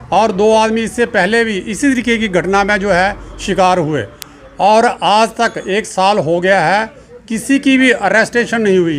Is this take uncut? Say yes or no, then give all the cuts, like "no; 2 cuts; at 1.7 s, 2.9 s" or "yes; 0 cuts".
yes; 0 cuts